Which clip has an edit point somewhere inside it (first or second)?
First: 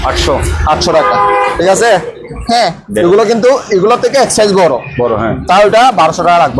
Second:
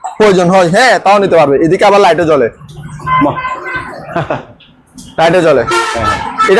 first